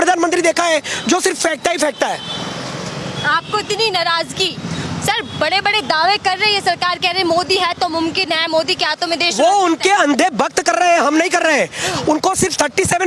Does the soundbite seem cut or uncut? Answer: uncut